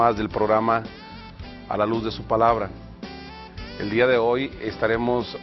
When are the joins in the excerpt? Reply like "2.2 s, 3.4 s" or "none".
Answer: 1.9 s